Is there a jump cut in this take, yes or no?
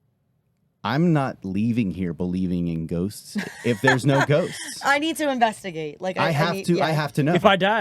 no